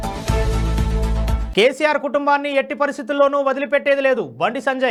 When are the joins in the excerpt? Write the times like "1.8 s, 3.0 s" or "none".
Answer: none